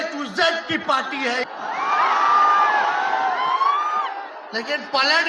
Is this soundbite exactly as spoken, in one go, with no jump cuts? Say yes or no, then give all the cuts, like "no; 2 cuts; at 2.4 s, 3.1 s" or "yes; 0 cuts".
no; 1 cut; at 1.4 s